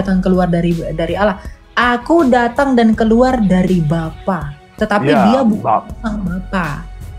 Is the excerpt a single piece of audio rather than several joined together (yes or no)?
yes